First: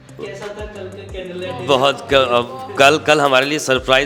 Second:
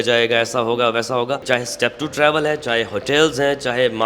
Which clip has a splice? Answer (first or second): second